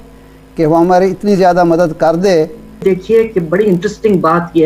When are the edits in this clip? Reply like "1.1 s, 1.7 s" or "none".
2.8 s